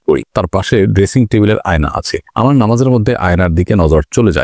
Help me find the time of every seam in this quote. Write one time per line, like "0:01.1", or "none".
none